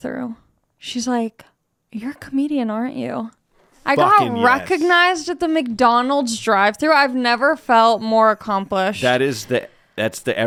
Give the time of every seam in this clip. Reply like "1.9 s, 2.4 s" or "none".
none

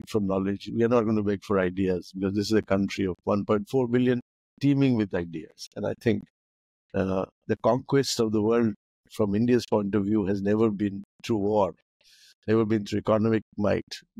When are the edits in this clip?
none

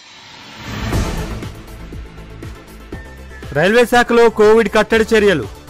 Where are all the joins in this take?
3.3 s

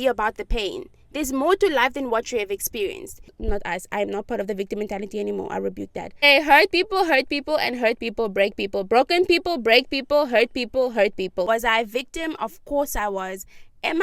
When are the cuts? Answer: 3.3 s, 6.3 s, 11.5 s

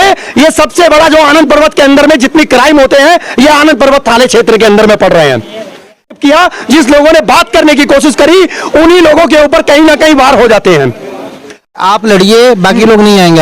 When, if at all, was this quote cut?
6.2 s, 11.7 s

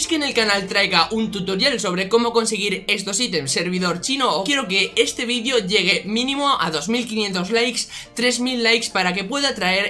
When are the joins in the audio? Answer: 3.5 s, 4.4 s

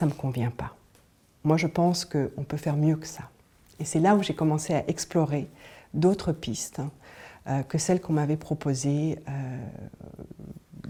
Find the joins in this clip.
none

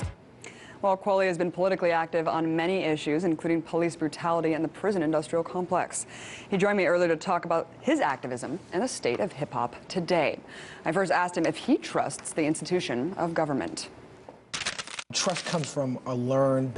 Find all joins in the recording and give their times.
none

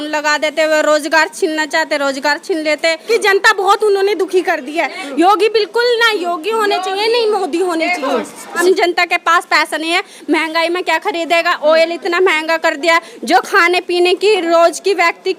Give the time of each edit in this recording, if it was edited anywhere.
3.1 s, 8.5 s

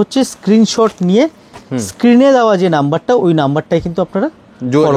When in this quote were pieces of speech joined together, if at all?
none

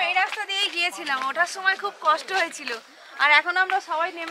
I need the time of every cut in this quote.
none

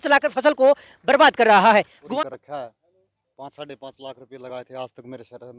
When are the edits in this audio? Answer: 2.0 s

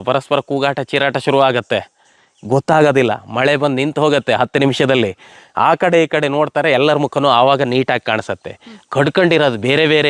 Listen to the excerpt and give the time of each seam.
none

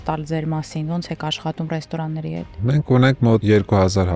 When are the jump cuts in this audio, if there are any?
2.6 s, 3.4 s

